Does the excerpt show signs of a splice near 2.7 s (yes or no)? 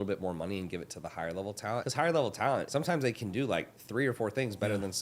yes